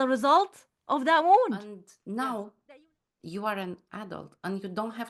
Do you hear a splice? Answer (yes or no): yes